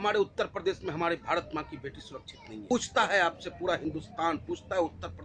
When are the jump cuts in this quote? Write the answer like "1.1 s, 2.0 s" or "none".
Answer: 2.7 s